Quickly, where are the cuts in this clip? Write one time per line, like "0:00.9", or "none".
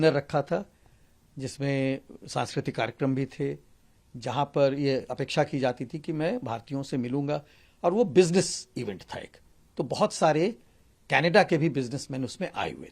none